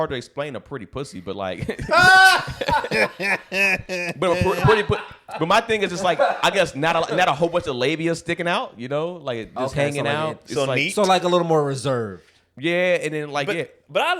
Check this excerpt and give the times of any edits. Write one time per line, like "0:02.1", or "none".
none